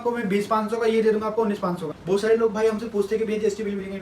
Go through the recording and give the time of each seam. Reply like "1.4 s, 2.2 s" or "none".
1.9 s